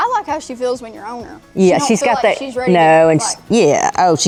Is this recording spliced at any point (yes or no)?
no